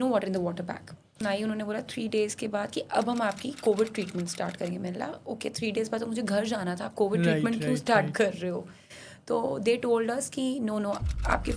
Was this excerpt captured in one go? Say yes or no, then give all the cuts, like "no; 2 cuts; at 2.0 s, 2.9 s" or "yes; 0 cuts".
no; 1 cut; at 1.2 s